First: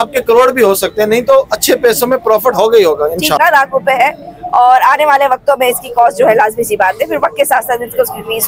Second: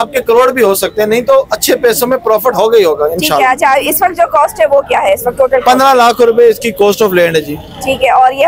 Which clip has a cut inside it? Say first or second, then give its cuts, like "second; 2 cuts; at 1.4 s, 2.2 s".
first; 1 cut; at 3.4 s